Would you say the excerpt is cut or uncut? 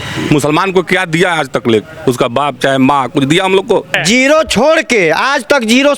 cut